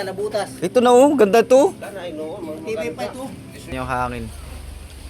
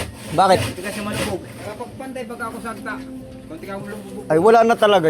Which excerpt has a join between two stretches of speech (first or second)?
first